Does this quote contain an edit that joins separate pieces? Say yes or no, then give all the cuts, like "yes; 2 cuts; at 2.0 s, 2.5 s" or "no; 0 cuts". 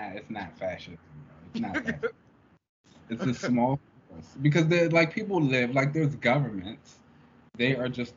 no; 0 cuts